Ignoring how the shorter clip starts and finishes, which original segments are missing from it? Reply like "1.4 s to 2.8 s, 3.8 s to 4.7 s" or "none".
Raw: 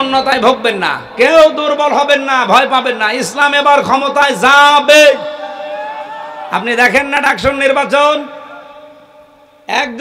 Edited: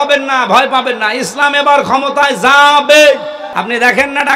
5.4 s to 6.4 s